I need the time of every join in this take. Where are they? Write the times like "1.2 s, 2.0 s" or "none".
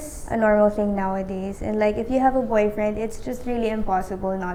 none